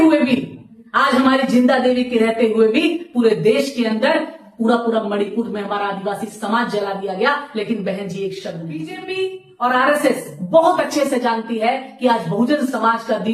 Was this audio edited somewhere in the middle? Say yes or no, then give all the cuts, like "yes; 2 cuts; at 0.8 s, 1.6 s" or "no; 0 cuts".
yes; 1 cut; at 9.1 s